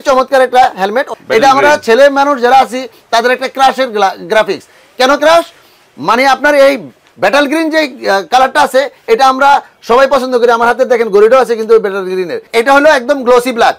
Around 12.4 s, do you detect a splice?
yes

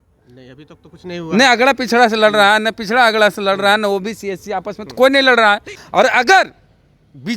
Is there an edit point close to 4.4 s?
no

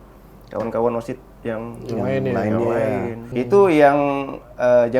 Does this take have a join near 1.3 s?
no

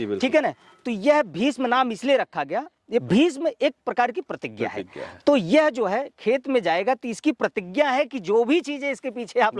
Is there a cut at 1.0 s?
no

